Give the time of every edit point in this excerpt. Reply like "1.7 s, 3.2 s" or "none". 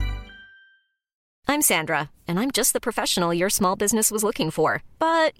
1.1 s